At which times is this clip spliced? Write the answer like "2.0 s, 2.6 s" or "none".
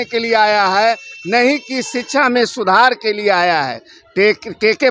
none